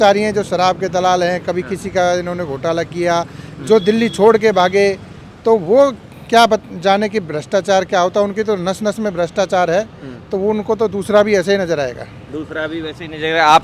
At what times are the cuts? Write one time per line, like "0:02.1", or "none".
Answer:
none